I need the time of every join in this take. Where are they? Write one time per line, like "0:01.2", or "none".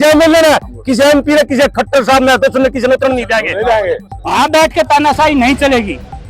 0:04.1